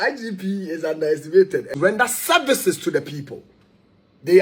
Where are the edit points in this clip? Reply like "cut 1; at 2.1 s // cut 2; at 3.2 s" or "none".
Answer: cut 1; at 1.7 s